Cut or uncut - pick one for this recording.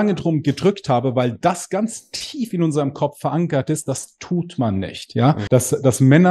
cut